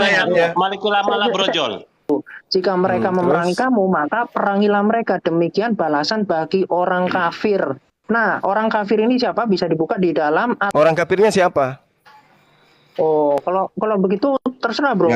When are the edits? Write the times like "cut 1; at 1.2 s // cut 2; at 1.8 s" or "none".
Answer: cut 1; at 2.1 s // cut 2; at 10.6 s